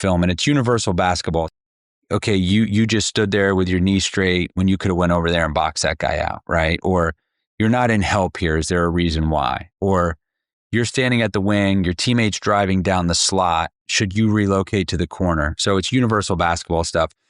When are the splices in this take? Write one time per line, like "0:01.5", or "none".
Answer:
0:01.5